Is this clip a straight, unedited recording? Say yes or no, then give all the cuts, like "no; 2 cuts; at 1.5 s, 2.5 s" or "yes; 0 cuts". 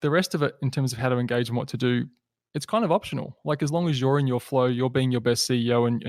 yes; 0 cuts